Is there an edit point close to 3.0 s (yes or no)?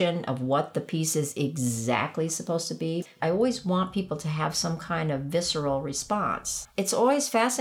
yes